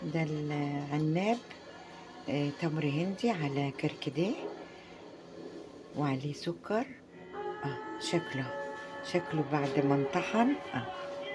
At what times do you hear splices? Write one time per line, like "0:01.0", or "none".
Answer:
none

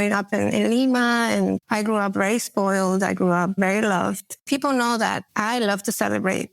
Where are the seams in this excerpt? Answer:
0:01.6
0:04.4
0:05.3

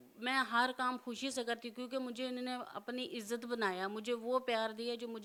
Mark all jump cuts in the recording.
none

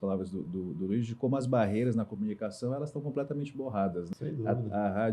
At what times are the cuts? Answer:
0:04.1

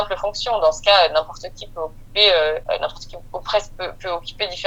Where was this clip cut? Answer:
none

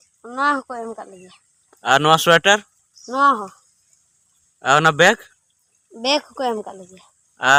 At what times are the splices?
none

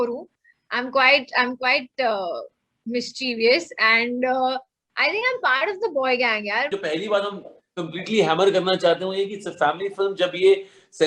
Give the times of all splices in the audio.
0:06.7

